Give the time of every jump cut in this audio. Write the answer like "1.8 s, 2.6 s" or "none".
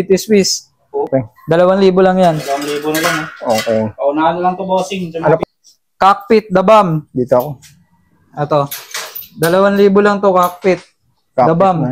1.1 s, 5.4 s